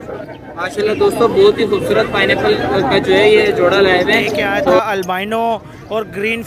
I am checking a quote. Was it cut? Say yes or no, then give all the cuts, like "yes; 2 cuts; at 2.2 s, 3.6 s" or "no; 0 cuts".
yes; 1 cut; at 4.8 s